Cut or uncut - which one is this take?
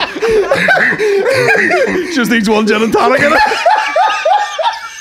uncut